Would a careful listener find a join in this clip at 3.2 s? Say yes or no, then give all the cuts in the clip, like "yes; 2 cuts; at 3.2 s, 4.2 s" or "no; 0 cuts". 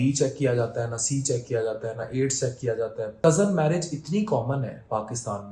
yes; 1 cut; at 3.2 s